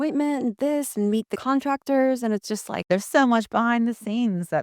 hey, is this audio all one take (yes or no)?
no